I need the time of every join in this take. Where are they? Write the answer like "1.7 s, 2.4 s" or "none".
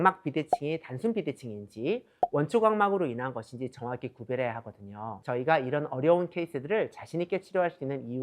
5.2 s